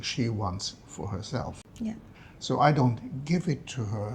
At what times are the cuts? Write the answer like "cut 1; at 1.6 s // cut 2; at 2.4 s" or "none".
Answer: cut 1; at 1.6 s

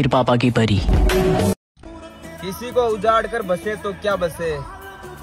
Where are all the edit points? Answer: cut 1; at 1.8 s

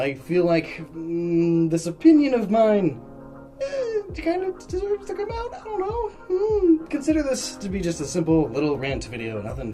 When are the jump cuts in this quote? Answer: cut 1; at 6.8 s

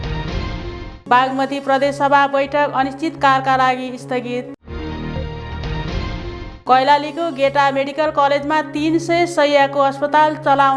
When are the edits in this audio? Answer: cut 1; at 0.9 s

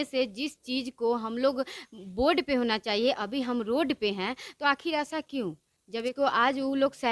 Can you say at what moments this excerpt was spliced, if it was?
cut 1; at 6.1 s

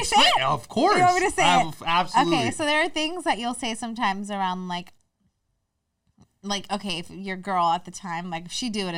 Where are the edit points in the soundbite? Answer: none

